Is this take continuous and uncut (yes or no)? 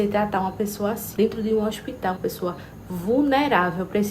no